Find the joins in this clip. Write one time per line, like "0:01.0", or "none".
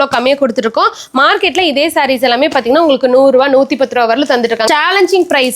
0:04.6